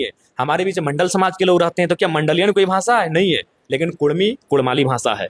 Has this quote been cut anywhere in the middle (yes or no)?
no